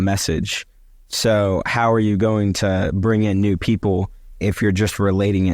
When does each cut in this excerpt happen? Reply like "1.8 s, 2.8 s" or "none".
none